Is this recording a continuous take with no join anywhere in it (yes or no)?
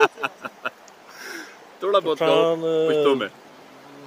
yes